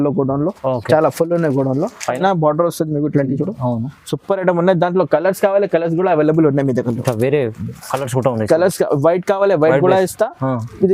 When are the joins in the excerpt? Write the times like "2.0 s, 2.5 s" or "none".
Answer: 2.2 s